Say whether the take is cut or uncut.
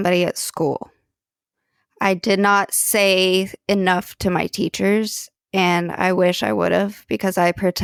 uncut